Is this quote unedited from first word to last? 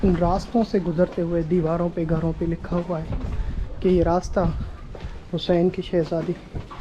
yes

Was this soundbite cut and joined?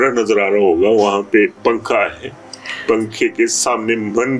no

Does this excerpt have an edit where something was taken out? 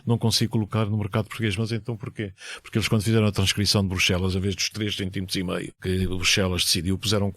yes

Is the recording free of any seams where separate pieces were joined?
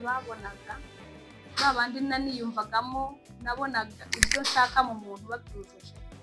yes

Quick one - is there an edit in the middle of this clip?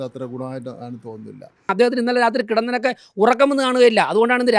yes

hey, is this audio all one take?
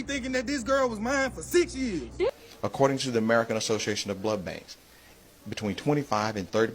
no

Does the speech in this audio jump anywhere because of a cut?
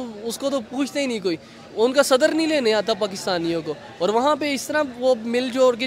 no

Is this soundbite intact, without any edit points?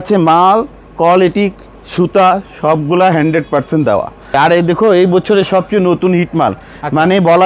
no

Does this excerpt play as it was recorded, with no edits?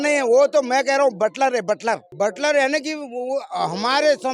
no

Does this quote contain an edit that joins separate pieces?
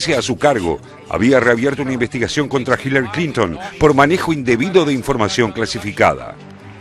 no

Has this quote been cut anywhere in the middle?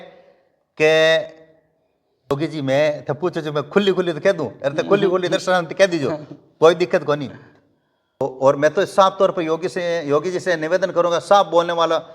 yes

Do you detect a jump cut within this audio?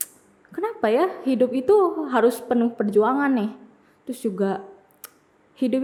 no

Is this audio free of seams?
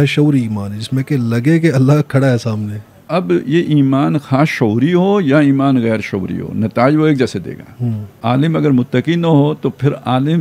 no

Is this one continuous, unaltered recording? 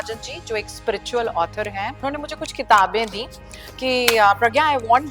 no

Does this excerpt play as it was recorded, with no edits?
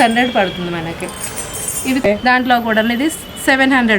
no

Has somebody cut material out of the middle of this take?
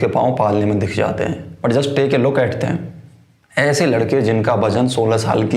yes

